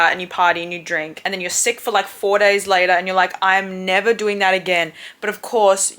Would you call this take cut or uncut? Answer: cut